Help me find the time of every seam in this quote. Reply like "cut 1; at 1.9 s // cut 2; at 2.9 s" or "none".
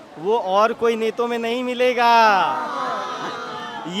none